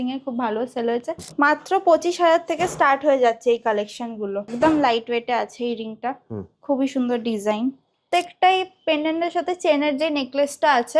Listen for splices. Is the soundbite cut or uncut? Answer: cut